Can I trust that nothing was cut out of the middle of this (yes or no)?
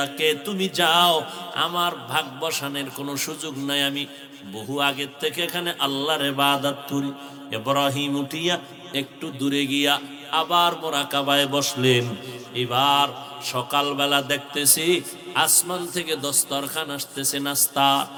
yes